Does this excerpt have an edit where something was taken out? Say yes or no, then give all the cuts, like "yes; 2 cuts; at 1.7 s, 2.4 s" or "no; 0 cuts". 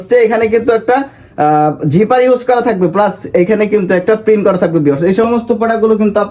yes; 1 cut; at 5.2 s